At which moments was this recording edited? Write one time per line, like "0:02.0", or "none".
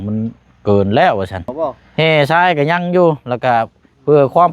0:01.5